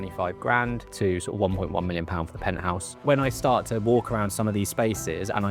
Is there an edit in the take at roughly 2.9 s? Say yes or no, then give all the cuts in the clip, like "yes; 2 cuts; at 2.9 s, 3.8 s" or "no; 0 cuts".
yes; 2 cuts; at 0.9 s, 2.9 s